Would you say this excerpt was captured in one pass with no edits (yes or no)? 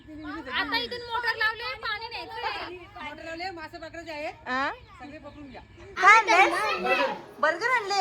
no